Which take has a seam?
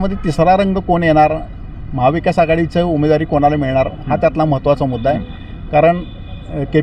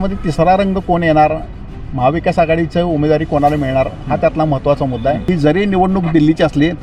second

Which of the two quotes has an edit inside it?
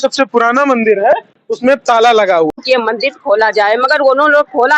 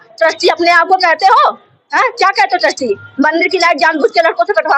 first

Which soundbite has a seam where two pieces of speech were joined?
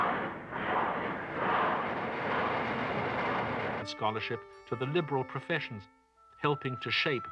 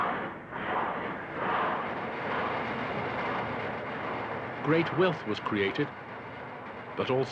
second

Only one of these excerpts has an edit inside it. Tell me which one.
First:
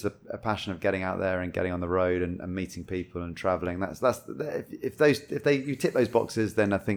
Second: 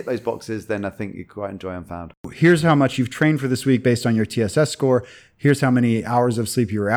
second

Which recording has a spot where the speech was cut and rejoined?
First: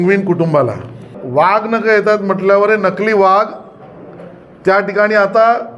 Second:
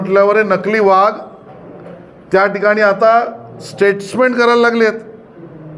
first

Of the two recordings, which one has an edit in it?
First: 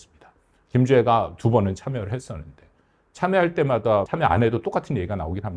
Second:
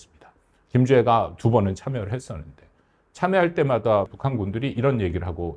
second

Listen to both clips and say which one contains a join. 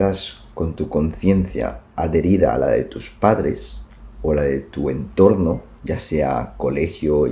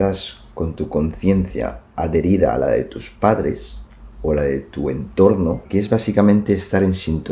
second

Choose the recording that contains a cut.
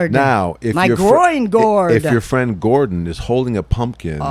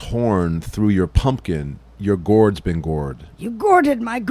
second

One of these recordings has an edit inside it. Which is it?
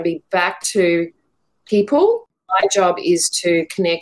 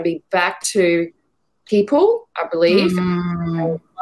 first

